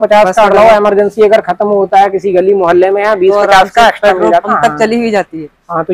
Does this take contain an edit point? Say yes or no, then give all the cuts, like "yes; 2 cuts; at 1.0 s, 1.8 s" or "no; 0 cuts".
no; 0 cuts